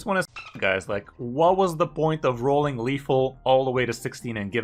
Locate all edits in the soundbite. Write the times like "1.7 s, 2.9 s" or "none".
none